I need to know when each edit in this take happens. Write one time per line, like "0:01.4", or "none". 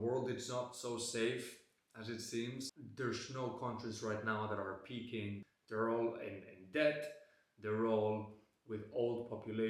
0:05.5